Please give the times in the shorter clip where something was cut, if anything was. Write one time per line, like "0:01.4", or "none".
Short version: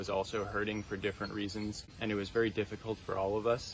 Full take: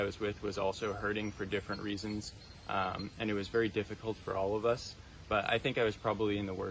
0:01.9